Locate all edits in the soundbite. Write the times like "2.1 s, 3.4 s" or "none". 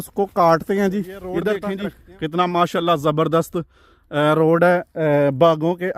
1.7 s